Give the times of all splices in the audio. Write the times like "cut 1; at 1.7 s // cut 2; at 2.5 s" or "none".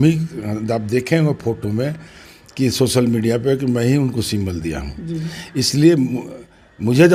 none